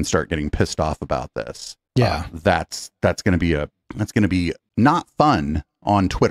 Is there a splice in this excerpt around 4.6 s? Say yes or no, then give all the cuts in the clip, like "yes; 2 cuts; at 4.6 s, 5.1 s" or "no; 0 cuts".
no; 0 cuts